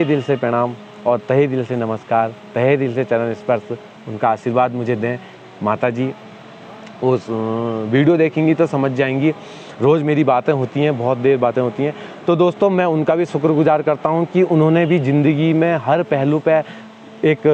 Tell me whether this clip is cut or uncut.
uncut